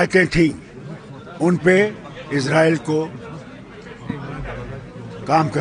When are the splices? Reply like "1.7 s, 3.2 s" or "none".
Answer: none